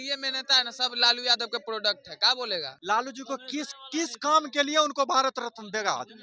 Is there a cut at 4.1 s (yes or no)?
no